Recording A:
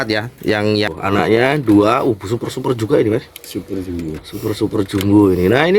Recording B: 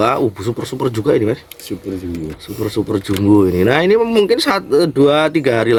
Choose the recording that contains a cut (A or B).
A